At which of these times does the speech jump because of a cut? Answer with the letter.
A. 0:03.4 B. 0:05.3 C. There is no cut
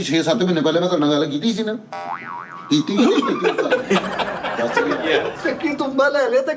B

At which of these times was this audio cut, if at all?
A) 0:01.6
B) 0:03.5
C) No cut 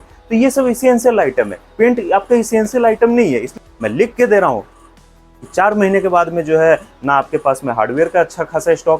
B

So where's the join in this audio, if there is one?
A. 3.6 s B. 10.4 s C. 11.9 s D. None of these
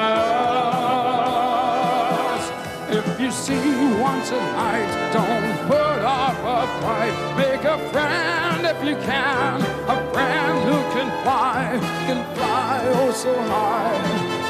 B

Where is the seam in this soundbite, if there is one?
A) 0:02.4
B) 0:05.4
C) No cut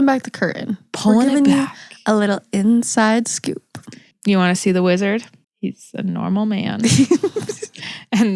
C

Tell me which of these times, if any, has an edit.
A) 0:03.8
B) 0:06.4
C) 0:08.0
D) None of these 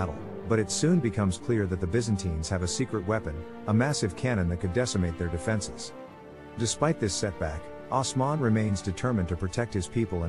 B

